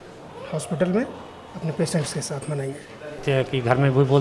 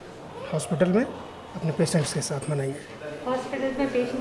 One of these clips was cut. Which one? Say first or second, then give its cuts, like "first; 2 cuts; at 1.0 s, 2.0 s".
first; 1 cut; at 3.2 s